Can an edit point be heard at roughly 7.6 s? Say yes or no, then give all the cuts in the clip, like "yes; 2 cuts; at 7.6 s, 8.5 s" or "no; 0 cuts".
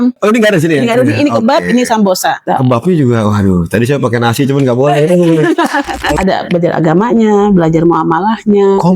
no; 2 cuts; at 2.4 s, 6.1 s